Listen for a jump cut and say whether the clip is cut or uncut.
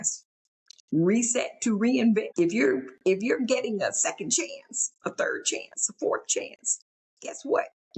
cut